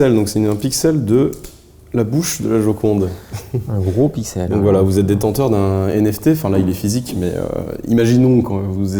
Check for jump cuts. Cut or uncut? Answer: uncut